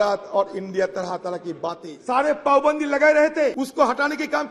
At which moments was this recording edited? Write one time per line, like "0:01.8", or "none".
0:01.9
0:03.5